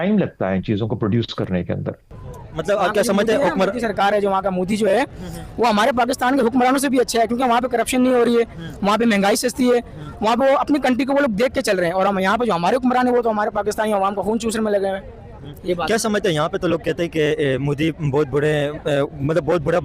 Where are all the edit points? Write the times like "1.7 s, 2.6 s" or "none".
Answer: 2.2 s